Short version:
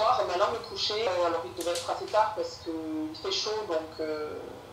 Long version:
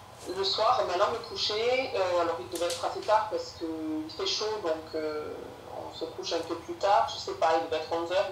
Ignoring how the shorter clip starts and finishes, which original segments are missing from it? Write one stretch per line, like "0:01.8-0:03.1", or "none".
0:01.7-0:02.0